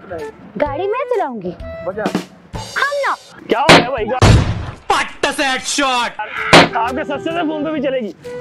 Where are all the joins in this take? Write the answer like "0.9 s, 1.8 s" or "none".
3.4 s